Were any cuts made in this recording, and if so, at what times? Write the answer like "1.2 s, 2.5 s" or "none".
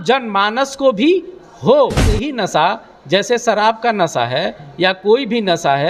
2.3 s